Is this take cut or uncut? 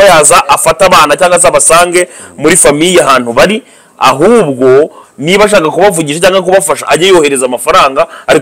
uncut